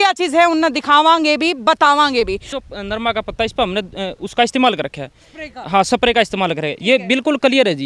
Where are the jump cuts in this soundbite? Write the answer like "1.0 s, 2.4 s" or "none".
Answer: 2.6 s